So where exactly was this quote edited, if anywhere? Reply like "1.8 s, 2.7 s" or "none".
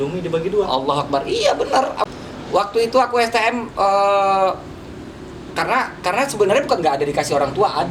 2.0 s

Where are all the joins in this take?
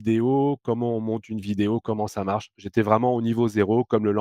2.6 s

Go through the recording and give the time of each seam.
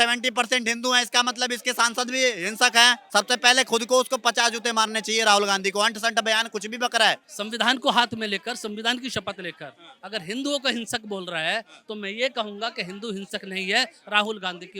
3.0 s, 7.2 s

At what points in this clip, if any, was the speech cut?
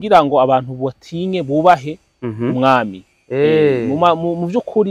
none

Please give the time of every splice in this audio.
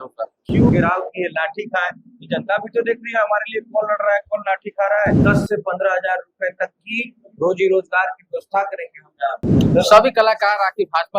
0.7 s, 5.2 s, 9.5 s

